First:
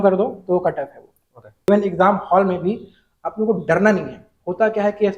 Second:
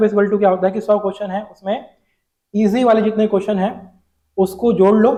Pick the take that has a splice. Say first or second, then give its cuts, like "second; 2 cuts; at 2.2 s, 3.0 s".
first; 1 cut; at 1.7 s